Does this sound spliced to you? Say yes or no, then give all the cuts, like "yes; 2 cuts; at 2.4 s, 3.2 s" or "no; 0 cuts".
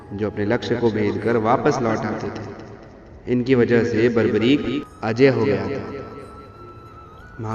yes; 1 cut; at 4.9 s